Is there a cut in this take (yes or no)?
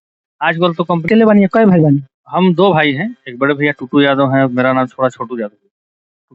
yes